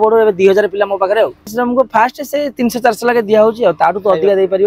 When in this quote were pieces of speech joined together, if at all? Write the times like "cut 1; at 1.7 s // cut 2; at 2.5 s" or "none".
cut 1; at 1.4 s